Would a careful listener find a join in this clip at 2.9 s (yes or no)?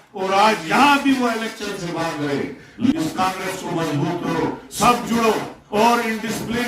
yes